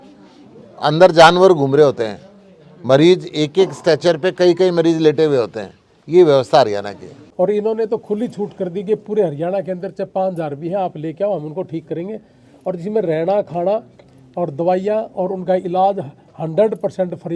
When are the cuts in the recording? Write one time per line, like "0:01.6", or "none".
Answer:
0:07.2